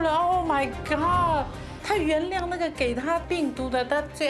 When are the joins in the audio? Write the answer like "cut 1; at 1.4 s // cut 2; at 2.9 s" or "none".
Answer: cut 1; at 3.2 s